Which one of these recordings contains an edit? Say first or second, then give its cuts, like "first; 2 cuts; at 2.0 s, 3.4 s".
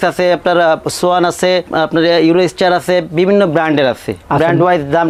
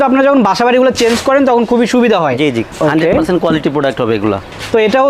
second; 1 cut; at 2.7 s